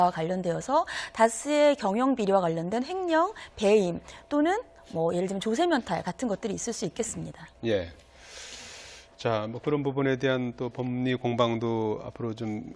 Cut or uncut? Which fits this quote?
uncut